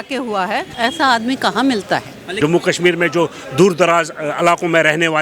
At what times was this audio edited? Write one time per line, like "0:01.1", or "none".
0:02.2